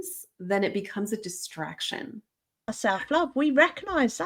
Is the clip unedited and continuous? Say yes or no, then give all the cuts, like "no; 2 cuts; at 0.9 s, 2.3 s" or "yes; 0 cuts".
no; 1 cut; at 2.7 s